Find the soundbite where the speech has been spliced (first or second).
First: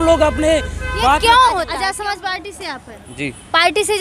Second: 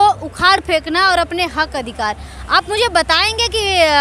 first